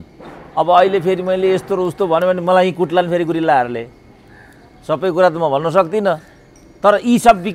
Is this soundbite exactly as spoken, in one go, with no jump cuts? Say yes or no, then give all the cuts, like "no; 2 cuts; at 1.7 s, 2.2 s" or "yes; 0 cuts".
yes; 0 cuts